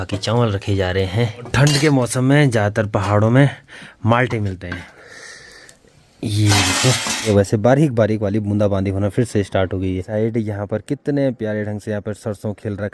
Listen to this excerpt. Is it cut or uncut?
cut